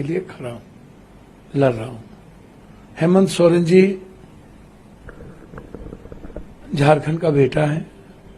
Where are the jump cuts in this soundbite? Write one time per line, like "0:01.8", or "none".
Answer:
none